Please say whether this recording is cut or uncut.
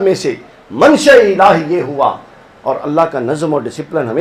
uncut